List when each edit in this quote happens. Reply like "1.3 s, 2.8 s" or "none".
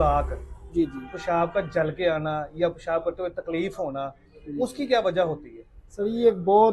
none